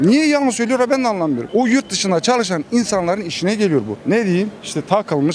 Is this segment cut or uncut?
cut